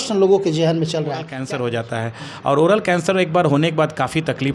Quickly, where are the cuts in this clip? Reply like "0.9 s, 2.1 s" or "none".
1.4 s